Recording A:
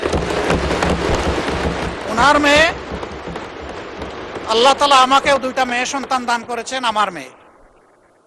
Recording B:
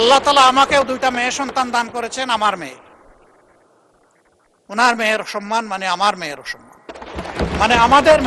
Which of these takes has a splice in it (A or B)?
A